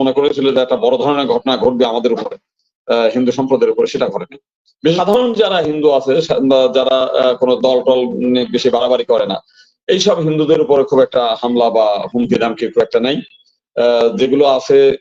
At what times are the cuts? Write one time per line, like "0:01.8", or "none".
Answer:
0:05.0